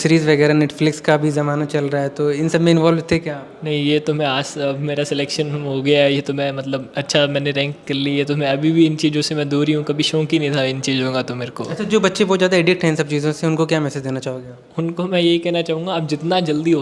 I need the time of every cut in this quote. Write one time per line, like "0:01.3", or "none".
none